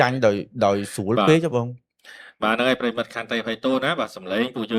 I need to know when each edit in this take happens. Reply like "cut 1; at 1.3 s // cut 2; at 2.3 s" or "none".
none